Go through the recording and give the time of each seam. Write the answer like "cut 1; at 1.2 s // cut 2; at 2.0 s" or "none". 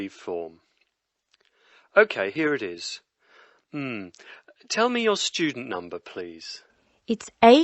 none